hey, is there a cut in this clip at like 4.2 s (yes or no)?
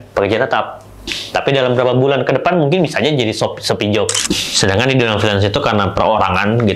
yes